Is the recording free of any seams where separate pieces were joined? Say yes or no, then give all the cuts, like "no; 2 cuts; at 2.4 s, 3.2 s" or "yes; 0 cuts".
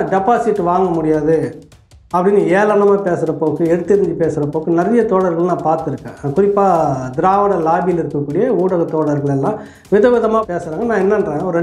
no; 1 cut; at 10.5 s